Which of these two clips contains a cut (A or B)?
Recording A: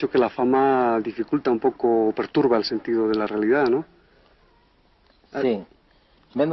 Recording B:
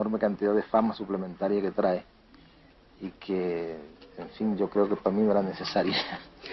A